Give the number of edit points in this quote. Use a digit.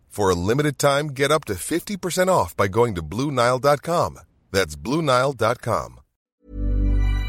1